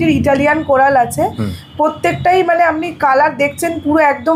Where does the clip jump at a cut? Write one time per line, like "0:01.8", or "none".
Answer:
none